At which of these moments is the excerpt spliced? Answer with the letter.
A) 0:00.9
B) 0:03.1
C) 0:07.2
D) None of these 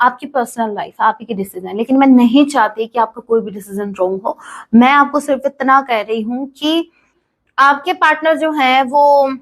C